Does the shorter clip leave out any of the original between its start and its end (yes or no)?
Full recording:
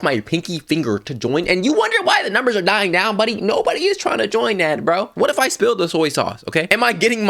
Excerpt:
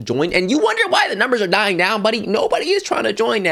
no